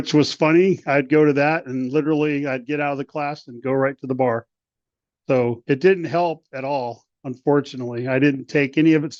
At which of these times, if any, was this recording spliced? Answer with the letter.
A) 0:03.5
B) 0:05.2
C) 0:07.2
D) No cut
D